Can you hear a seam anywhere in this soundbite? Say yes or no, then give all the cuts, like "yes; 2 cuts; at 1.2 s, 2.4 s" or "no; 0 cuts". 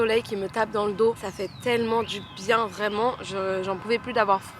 no; 0 cuts